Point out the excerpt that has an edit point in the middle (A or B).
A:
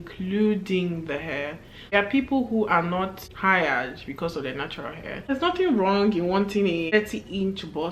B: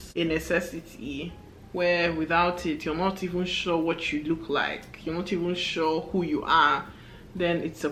A